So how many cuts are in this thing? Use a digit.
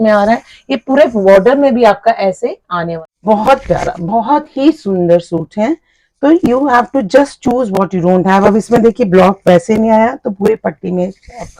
1